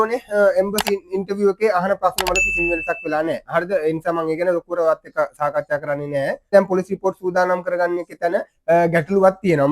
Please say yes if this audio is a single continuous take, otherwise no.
no